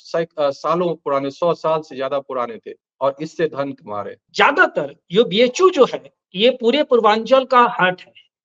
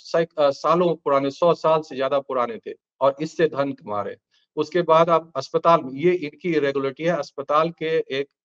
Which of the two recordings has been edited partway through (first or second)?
first